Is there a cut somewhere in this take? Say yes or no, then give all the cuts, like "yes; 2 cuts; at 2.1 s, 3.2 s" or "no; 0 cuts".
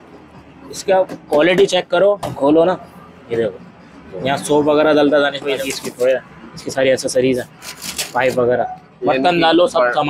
yes; 3 cuts; at 2.2 s, 5.6 s, 8.9 s